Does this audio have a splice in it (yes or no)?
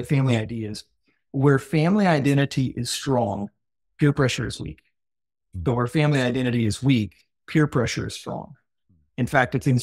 no